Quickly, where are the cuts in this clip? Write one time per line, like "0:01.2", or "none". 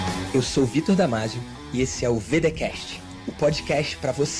none